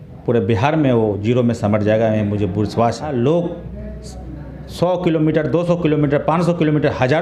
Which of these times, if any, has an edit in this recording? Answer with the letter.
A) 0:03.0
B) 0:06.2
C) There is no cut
A